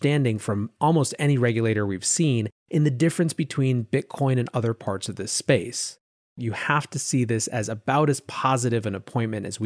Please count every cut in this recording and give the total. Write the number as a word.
one